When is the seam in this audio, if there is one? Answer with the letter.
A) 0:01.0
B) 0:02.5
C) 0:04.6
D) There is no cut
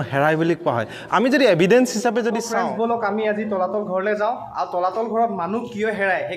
B